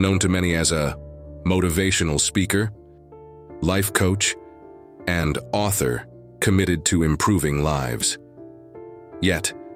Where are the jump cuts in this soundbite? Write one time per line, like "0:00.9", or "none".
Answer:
none